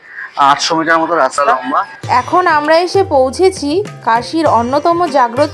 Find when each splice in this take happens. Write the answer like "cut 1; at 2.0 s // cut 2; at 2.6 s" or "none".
cut 1; at 1.5 s